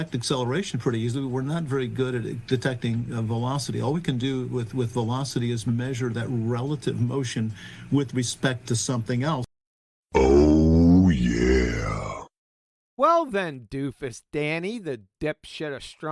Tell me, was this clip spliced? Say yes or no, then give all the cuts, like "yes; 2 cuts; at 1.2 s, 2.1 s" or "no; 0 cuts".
yes; 1 cut; at 1.2 s